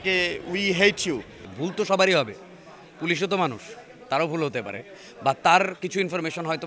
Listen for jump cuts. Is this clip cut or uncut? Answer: cut